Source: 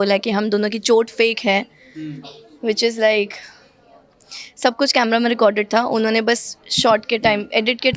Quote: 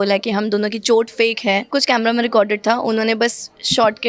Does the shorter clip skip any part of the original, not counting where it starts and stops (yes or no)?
yes